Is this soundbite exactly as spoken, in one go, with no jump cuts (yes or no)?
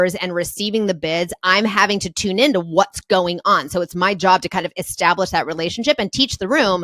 yes